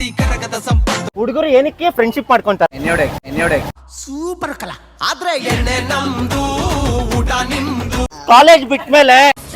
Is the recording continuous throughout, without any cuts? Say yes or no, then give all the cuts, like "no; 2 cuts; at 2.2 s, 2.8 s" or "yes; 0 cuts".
no; 2 cuts; at 1.1 s, 8.1 s